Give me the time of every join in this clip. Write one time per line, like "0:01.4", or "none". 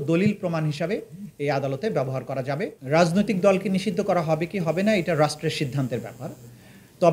0:02.8

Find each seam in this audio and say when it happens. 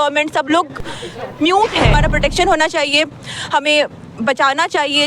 0:02.0

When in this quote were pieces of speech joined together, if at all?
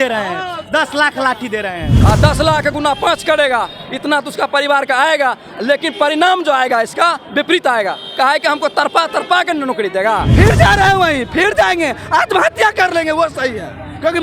0:01.9
0:10.3

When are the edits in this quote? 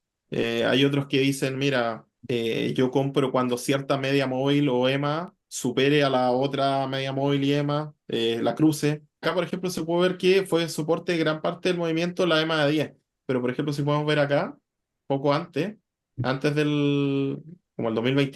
0:02.1
0:09.2

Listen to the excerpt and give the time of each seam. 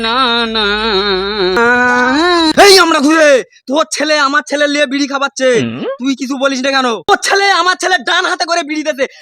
0:01.6
0:07.1

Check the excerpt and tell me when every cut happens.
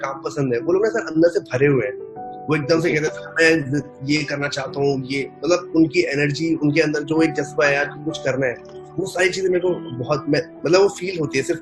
none

